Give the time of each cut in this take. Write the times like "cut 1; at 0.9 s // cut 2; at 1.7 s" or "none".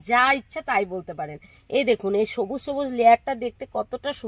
none